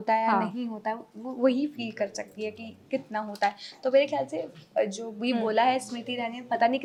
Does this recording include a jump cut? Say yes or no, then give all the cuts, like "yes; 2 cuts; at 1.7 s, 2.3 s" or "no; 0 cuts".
no; 0 cuts